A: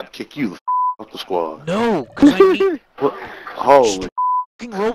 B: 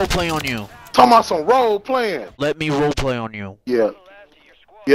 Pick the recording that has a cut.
B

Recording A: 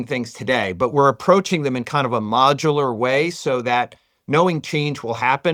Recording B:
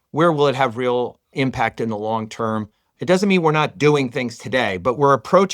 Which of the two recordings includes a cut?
B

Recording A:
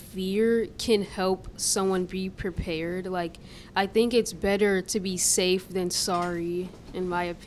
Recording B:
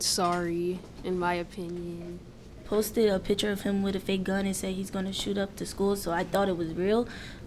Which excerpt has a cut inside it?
B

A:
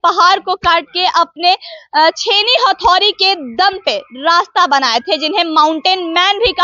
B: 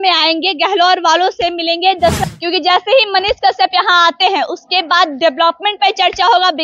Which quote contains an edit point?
B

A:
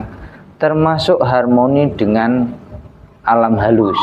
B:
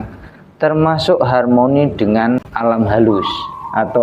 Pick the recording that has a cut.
B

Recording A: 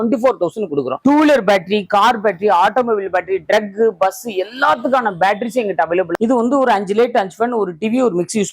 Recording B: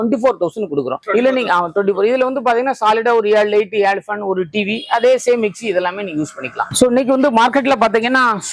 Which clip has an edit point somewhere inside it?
A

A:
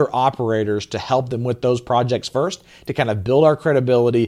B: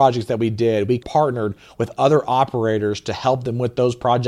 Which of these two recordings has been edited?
B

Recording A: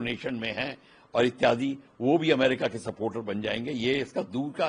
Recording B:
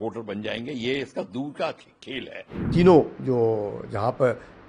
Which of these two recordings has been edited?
B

